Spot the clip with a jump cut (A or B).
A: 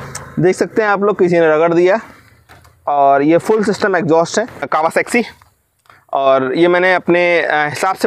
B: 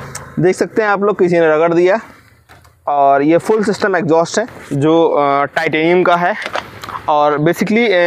A